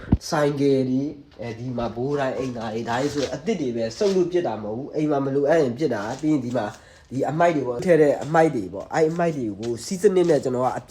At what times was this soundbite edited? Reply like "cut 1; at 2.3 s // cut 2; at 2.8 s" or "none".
cut 1; at 7.8 s

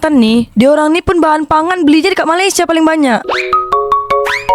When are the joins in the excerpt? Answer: cut 1; at 3.3 s

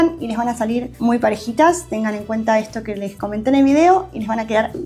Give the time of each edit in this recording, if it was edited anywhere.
none

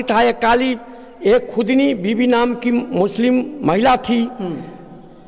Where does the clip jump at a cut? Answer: none

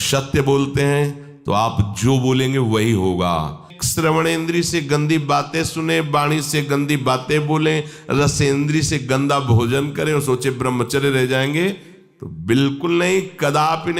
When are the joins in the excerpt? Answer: cut 1; at 3.7 s

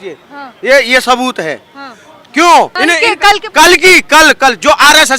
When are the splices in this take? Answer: cut 1; at 2.7 s

